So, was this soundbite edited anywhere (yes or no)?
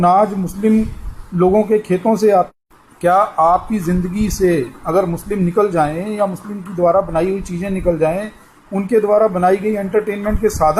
yes